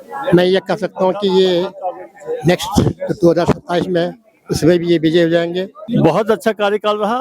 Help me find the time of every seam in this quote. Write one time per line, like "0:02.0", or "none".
0:05.7